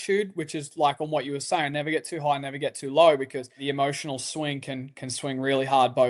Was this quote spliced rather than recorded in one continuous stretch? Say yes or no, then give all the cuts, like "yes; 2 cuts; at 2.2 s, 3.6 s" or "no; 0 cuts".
yes; 1 cut; at 3.6 s